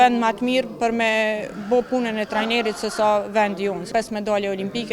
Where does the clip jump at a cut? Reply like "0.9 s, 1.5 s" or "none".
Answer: 3.8 s